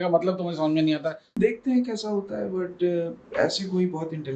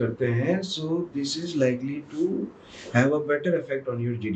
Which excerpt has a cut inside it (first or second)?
first